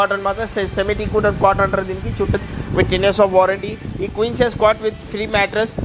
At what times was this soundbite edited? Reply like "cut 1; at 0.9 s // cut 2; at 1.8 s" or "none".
cut 1; at 2.4 s

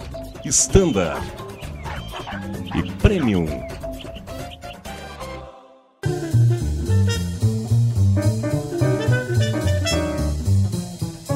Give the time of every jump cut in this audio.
cut 1; at 6.0 s

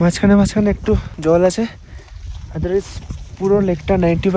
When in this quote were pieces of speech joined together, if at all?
cut 1; at 1.1 s

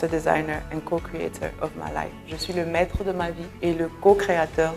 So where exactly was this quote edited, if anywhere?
cut 1; at 3.5 s

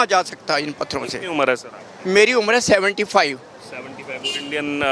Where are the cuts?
none

